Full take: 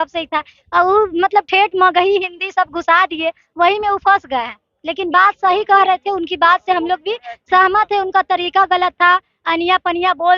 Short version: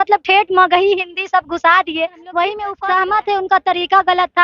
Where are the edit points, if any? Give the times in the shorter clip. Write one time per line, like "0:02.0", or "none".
0:02.7